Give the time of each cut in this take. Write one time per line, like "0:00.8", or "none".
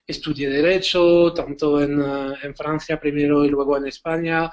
none